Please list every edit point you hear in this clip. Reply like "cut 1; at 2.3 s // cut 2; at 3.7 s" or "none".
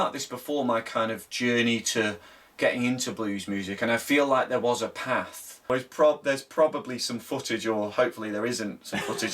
cut 1; at 5.7 s